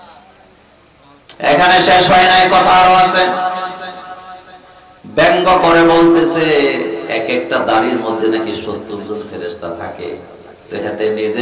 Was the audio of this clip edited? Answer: no; 0 cuts

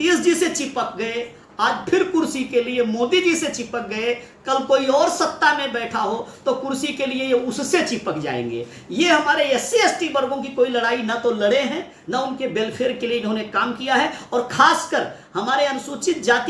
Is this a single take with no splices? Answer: yes; 0 cuts

